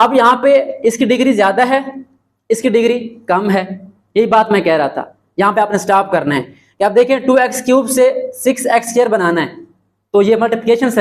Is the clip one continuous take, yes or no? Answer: yes